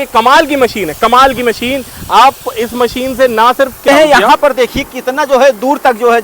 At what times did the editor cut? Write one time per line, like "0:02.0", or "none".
0:03.9

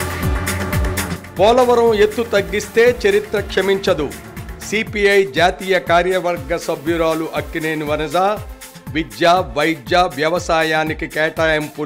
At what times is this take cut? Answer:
0:01.1

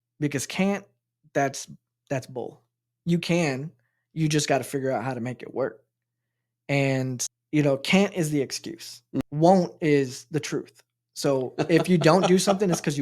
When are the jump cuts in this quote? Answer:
0:07.3
0:09.2

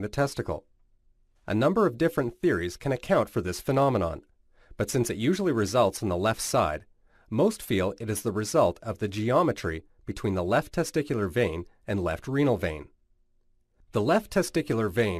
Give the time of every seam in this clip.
none

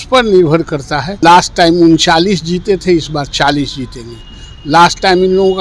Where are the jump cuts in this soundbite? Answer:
0:01.1

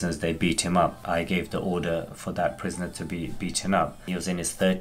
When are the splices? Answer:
0:01.1
0:04.0

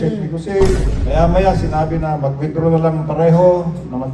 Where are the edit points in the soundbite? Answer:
0:00.9

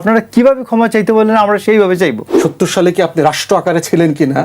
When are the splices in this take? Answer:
0:02.3

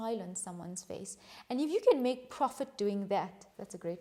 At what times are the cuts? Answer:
none

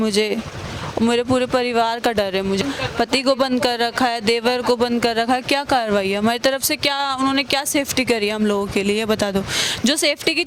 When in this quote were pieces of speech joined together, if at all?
0:02.6

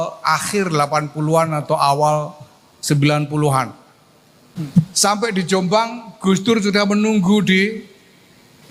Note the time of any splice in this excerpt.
0:04.6

